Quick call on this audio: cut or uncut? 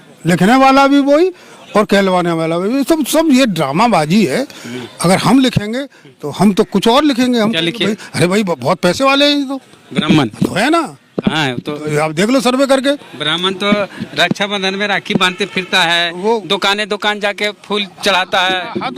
uncut